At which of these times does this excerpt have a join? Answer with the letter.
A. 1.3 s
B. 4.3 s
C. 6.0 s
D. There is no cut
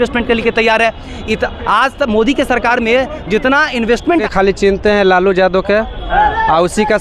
B